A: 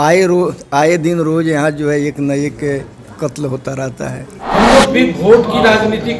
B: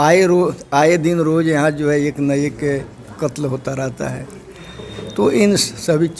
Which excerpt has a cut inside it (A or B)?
A